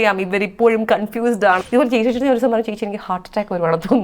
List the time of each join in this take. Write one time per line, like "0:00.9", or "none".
0:01.6